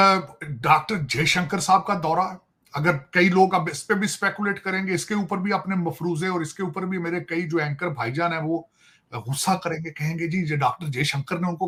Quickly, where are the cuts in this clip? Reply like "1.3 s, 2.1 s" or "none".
none